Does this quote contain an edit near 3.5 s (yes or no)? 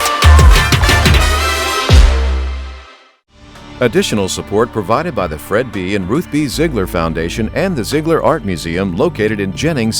yes